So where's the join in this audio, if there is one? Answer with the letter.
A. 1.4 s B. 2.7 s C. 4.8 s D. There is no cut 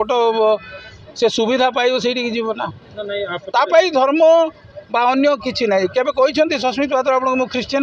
D